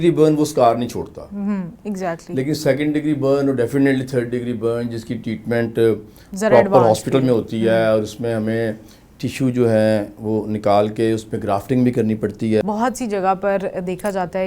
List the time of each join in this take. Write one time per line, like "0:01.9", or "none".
0:12.6